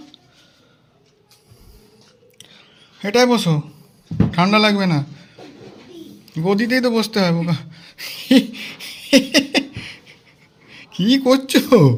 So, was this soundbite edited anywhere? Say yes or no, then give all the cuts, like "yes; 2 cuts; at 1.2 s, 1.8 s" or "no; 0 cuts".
no; 0 cuts